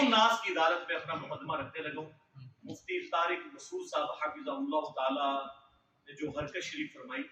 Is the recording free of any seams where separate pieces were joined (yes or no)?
yes